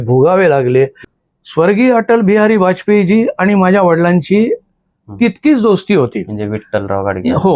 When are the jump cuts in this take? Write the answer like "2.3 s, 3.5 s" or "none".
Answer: 1.1 s